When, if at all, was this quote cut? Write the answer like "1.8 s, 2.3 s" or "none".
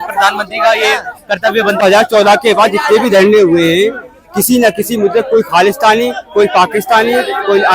1.8 s